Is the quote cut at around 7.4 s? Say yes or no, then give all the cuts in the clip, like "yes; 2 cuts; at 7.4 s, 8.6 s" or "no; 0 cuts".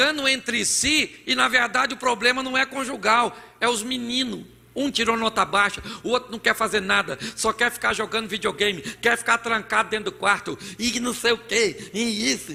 no; 0 cuts